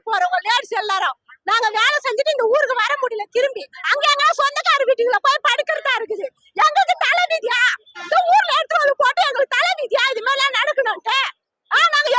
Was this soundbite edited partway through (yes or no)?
no